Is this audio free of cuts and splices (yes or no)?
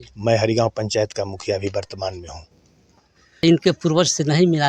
no